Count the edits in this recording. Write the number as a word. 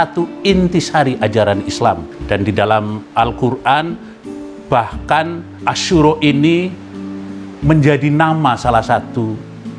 two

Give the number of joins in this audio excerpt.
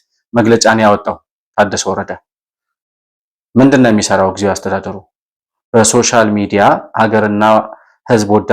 zero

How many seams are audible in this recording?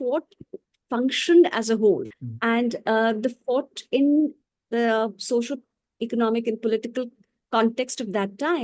one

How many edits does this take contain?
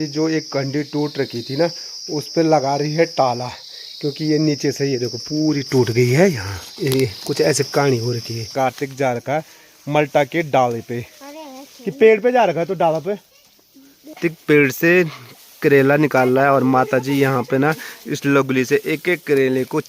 two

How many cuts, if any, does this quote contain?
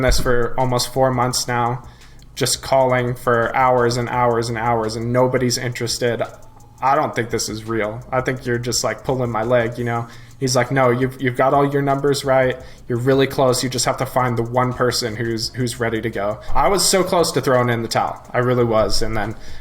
one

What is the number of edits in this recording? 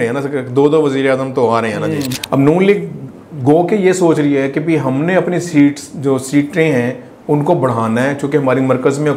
one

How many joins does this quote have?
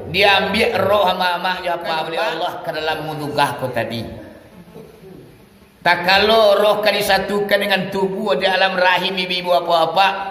one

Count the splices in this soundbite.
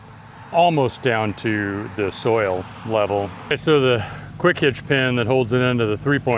one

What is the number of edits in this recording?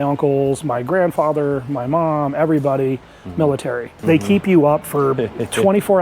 one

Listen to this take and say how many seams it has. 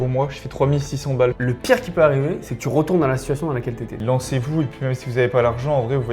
two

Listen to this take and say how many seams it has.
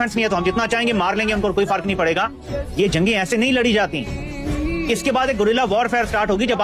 zero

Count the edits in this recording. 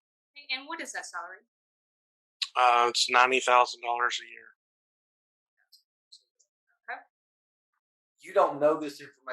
one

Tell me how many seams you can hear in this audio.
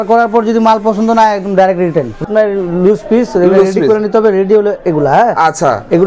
one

